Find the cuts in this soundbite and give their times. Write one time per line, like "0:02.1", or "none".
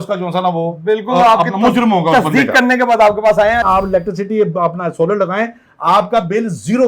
0:03.7